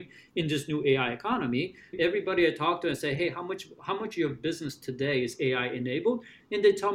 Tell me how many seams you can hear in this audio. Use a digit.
1